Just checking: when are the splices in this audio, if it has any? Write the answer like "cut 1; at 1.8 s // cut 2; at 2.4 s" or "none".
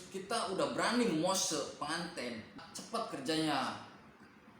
cut 1; at 2.6 s